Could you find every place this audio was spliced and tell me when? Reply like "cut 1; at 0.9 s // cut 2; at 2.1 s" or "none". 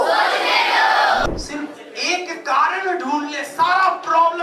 cut 1; at 1.2 s